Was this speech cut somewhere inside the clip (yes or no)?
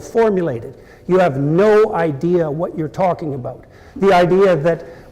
yes